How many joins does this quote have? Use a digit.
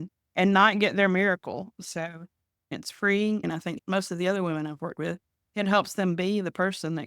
2